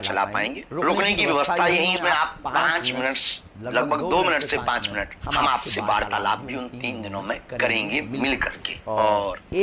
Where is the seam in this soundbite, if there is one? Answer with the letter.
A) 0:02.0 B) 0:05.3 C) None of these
A